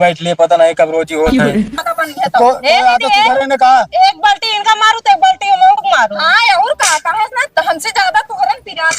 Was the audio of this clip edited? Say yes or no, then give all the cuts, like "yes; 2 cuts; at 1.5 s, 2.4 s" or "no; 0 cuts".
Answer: yes; 1 cut; at 1.7 s